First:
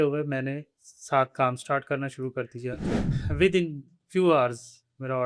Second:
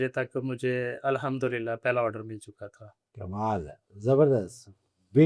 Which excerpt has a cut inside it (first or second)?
first